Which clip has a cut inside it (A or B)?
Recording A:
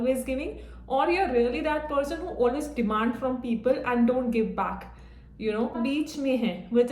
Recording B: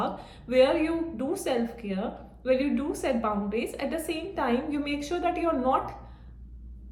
A